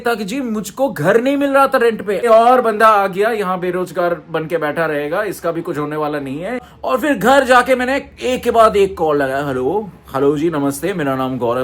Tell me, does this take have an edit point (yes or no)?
yes